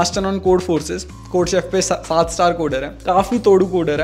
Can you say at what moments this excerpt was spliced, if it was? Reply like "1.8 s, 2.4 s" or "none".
2.9 s